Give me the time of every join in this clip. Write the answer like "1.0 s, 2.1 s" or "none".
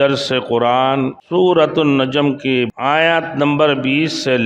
1.2 s, 2.7 s